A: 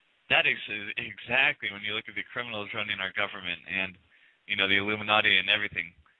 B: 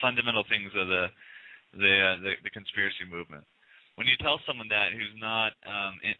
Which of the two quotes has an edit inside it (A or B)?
B